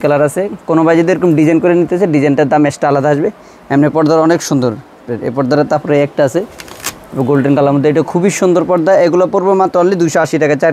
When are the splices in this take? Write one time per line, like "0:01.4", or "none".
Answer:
none